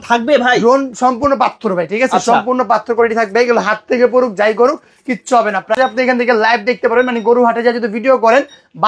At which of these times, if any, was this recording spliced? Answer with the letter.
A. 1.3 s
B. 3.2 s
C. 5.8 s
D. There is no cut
C